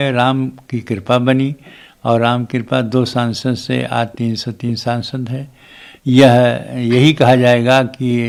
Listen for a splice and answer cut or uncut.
uncut